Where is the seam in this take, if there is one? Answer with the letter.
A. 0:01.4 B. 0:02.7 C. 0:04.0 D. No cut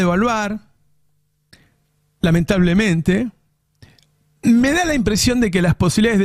D